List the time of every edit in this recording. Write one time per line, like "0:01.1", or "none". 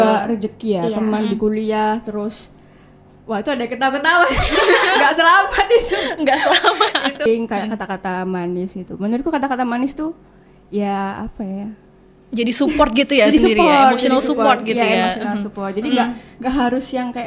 0:07.2